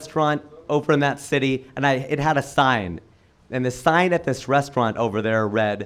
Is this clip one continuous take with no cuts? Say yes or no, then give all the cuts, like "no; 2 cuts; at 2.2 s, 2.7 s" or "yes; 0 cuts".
yes; 0 cuts